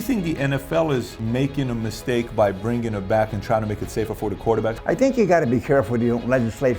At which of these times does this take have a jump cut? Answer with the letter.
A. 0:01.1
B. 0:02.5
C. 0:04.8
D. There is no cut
C